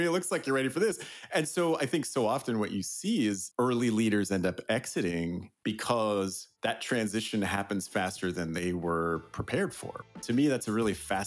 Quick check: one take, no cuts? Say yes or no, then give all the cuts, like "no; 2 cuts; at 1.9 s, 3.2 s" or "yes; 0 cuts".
no; 3 cuts; at 5.5 s, 6.4 s, 10.2 s